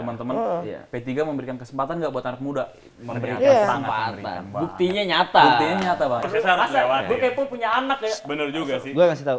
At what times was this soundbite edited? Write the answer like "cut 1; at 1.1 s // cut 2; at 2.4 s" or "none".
cut 1; at 6.3 s

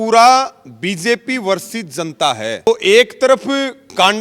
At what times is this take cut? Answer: cut 1; at 2.7 s

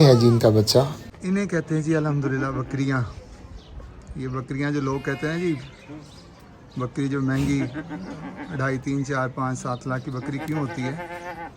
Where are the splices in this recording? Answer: cut 1; at 1.0 s

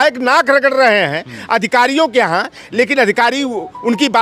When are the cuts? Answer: none

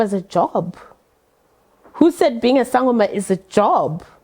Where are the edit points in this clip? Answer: none

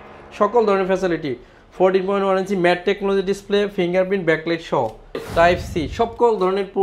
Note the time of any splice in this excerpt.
cut 1; at 5.2 s

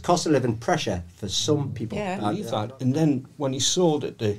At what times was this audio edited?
cut 1; at 2.4 s

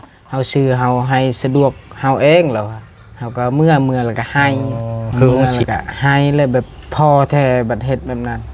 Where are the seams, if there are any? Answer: cut 1; at 5.5 s

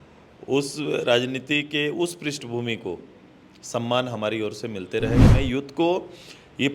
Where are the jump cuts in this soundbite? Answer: cut 1; at 5.2 s

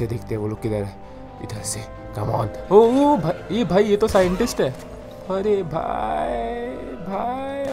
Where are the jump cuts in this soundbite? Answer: none

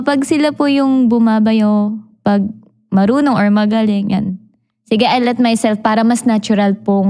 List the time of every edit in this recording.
none

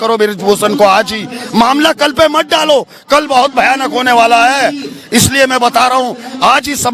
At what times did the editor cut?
none

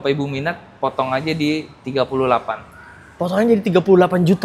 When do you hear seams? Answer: none

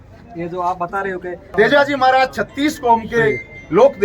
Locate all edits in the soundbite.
cut 1; at 1.5 s

